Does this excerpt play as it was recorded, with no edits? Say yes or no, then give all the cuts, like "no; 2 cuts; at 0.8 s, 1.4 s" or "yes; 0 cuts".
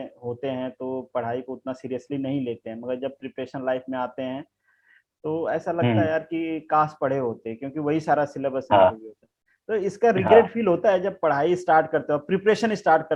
yes; 0 cuts